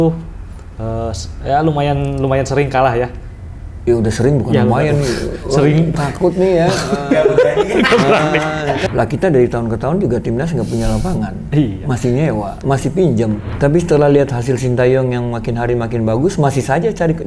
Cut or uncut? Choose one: cut